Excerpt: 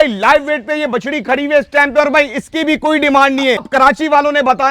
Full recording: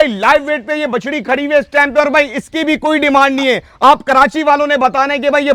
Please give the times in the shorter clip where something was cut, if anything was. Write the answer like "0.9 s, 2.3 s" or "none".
3.7 s